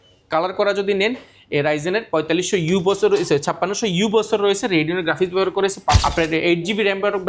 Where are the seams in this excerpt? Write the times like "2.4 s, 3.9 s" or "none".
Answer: 6.0 s

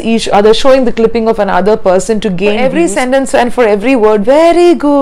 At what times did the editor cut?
2.6 s

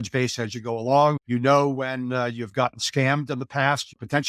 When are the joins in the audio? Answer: none

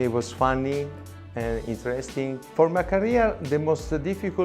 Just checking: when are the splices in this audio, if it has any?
2.4 s

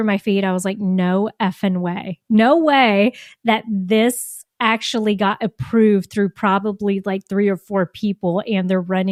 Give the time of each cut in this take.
none

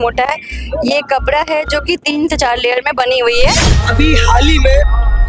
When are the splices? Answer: 3.6 s

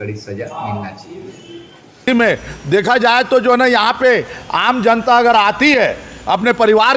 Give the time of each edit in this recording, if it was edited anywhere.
2.1 s

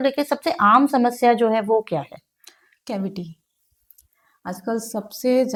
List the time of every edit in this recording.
none

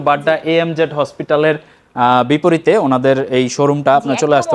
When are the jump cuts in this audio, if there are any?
none

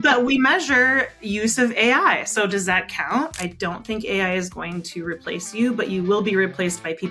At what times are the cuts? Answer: 3.3 s

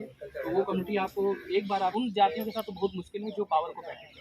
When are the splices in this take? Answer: 1.9 s

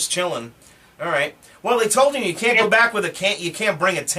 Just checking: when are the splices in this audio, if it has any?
1.3 s

